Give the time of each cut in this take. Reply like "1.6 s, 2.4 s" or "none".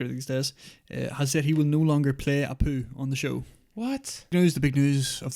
4.3 s